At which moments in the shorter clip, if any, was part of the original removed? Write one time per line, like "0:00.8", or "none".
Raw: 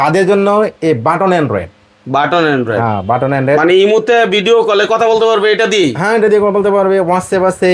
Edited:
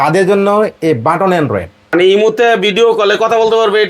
0:01.9